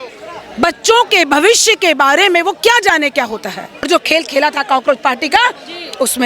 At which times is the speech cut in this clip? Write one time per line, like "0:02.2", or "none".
0:03.9